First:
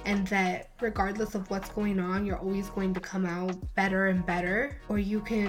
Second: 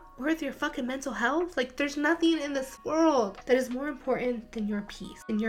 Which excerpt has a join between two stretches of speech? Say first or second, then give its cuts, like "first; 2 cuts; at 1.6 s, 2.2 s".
second; 2 cuts; at 2.8 s, 3.4 s